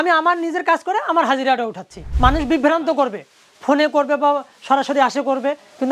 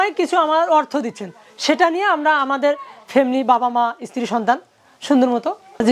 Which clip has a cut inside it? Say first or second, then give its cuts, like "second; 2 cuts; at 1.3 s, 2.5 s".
first; 1 cut; at 2.1 s